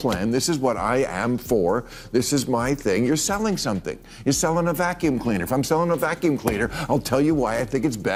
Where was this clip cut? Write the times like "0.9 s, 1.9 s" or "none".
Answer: none